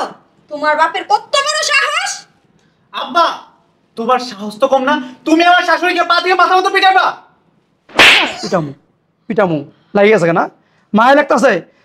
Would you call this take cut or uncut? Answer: uncut